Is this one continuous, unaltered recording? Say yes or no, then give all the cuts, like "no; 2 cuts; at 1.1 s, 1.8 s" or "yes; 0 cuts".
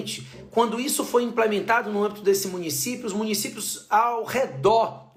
yes; 0 cuts